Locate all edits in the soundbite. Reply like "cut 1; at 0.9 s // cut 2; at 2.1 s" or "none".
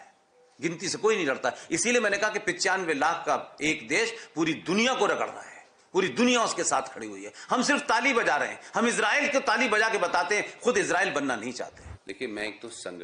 cut 1; at 12.0 s